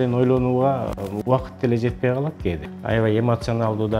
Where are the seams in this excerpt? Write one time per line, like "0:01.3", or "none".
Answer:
0:02.7

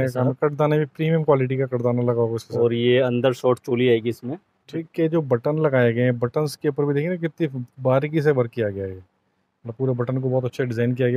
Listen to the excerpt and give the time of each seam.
0:04.8

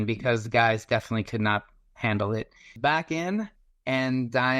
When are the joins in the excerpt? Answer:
0:02.7

